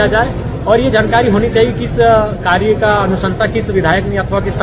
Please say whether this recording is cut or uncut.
uncut